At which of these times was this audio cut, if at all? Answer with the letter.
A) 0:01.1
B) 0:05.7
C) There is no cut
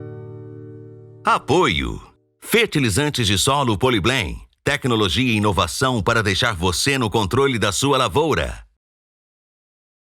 A